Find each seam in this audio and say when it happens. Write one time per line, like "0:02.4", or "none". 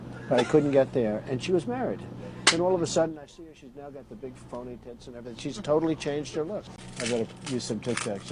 0:06.8